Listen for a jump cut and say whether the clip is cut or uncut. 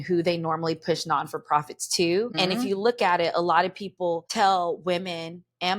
cut